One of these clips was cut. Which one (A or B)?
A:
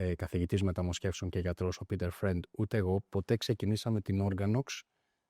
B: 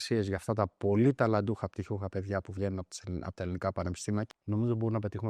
B